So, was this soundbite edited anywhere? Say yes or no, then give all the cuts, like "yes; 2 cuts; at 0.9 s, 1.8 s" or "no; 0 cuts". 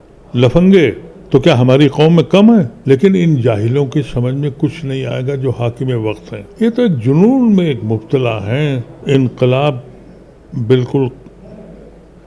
yes; 4 cuts; at 1.1 s, 2.8 s, 6.4 s, 8.9 s